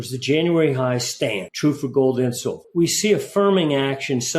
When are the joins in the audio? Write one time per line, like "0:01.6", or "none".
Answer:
0:01.5
0:02.6

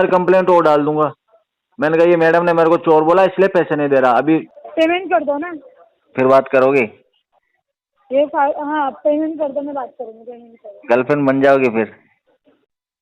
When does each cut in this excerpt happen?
0:04.6

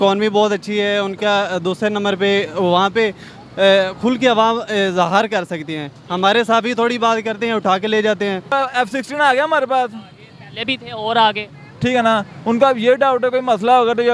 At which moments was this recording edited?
0:08.5

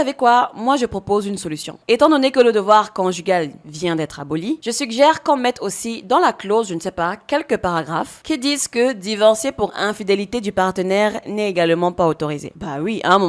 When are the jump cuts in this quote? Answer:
0:01.7
0:04.6

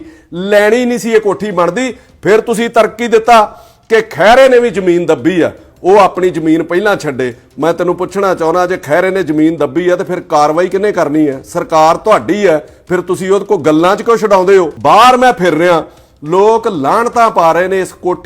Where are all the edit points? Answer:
0:14.7

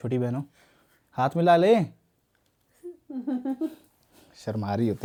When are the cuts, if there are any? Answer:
none

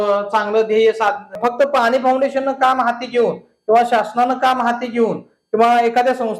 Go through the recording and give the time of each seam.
0:01.3

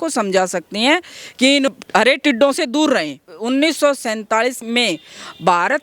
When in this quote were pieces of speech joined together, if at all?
0:03.3
0:04.6

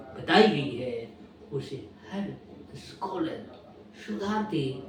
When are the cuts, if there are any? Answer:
none

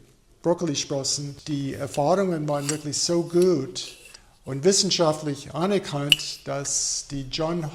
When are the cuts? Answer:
0:01.3

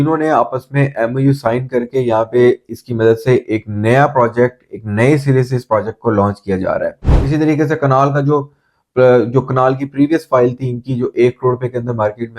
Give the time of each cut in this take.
0:07.1

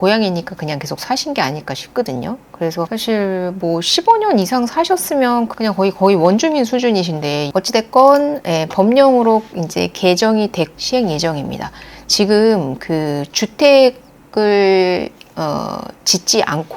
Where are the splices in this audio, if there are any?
0:07.5
0:10.7

